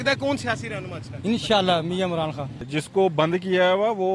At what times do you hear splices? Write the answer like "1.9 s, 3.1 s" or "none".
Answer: 2.6 s